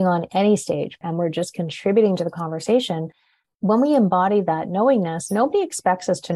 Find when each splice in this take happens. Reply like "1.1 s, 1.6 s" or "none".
1.0 s